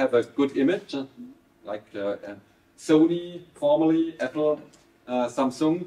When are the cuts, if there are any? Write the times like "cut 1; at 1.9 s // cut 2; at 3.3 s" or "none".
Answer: none